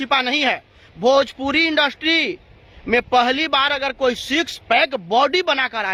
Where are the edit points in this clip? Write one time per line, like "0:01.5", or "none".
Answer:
none